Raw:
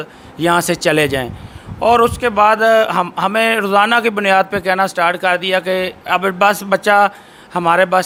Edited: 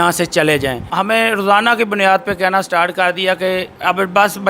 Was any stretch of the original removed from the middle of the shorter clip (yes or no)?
yes